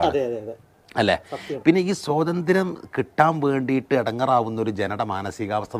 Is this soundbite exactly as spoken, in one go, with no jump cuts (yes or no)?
yes